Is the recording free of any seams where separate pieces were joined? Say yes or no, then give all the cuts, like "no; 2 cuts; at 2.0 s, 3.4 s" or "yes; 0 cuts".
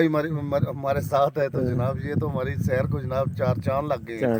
yes; 0 cuts